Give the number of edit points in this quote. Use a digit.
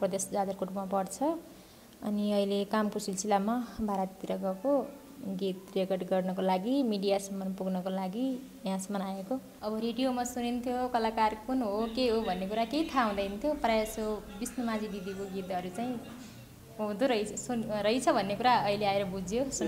1